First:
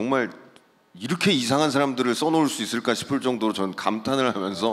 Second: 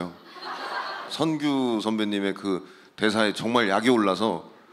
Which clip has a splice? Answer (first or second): second